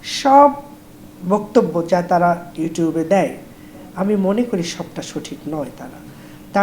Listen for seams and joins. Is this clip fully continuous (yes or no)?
yes